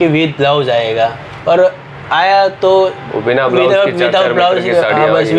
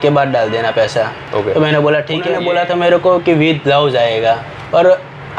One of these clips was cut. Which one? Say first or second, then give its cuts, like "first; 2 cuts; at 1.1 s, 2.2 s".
second; 1 cut; at 2.3 s